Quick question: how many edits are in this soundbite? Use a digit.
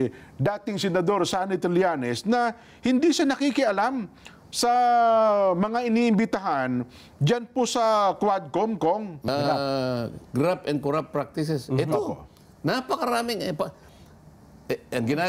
1